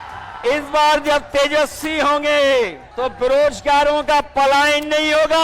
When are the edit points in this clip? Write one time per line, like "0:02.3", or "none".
0:02.8